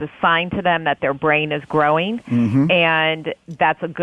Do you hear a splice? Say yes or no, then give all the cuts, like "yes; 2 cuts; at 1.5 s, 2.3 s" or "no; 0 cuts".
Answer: no; 0 cuts